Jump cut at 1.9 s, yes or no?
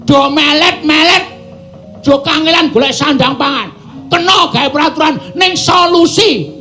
no